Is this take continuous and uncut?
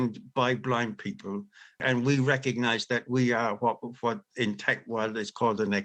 no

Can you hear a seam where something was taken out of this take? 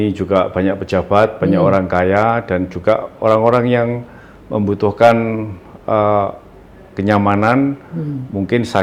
no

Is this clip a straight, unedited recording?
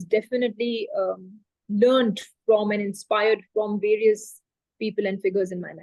yes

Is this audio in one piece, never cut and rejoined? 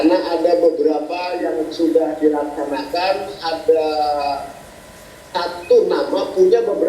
yes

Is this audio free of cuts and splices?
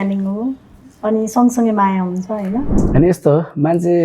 no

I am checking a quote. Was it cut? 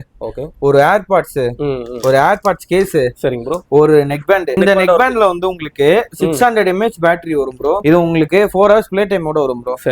yes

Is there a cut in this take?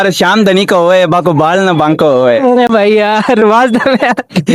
no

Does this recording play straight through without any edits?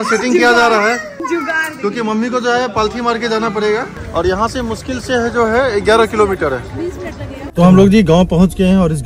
no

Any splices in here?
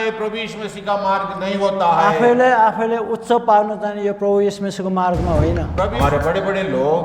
yes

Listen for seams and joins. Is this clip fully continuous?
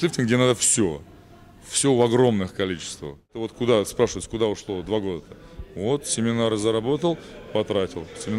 no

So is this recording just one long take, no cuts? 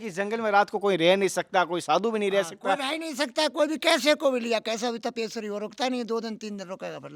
yes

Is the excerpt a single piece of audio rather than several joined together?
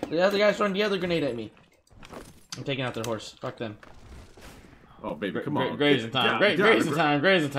no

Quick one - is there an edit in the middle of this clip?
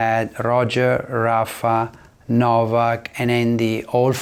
no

